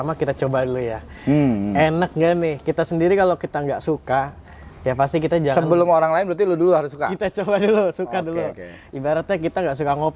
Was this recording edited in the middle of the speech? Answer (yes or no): no